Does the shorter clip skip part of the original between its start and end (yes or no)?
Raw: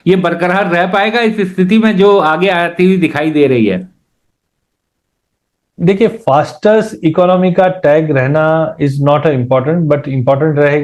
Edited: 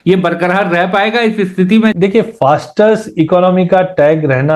yes